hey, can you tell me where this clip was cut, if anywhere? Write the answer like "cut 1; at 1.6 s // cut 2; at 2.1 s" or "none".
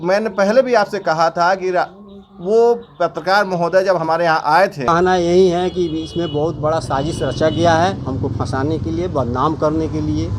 cut 1; at 4.9 s